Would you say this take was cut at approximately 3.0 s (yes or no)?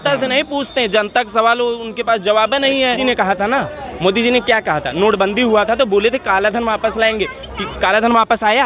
yes